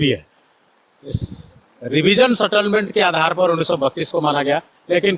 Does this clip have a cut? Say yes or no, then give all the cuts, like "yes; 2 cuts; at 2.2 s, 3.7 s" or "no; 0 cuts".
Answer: no; 0 cuts